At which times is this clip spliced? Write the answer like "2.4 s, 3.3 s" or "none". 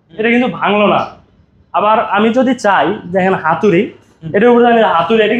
none